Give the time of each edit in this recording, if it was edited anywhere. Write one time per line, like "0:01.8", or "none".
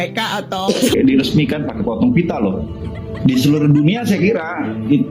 0:00.9

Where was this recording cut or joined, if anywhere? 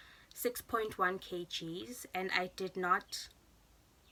none

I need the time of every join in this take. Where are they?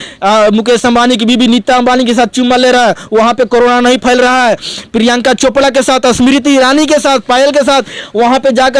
none

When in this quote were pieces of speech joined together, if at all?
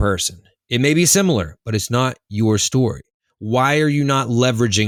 none

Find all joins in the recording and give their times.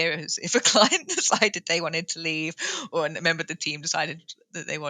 none

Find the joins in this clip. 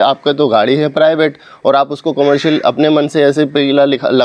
none

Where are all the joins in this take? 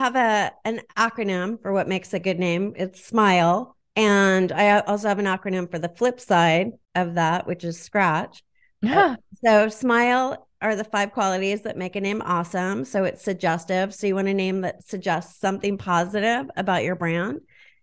0:03.8
0:06.8

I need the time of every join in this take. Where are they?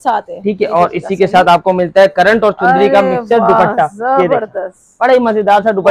none

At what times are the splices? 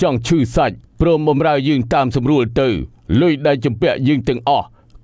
none

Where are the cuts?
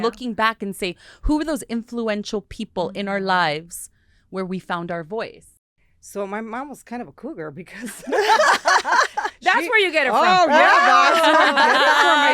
0:05.4

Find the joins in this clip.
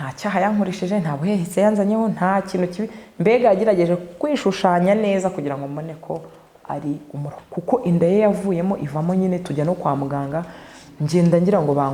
0:07.4

